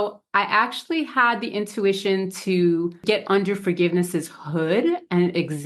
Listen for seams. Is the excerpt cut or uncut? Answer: cut